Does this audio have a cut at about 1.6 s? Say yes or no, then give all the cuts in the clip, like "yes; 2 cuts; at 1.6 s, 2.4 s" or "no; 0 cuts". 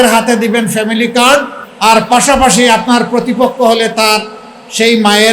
yes; 1 cut; at 1.6 s